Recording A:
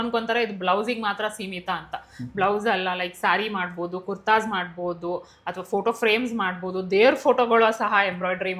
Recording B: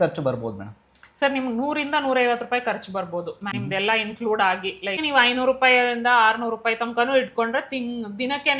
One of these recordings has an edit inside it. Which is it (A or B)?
B